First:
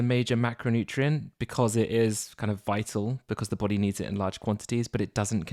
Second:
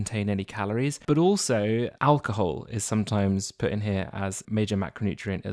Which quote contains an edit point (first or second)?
second